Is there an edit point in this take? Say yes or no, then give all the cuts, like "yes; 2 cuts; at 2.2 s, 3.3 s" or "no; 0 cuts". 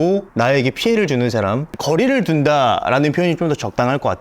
yes; 1 cut; at 1.7 s